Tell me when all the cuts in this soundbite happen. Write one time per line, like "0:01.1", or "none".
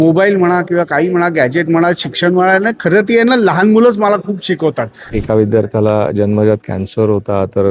0:05.0